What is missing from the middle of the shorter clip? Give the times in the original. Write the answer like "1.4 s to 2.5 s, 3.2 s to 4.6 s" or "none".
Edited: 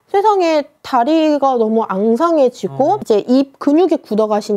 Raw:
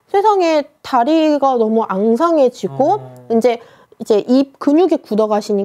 3.0 s to 4.0 s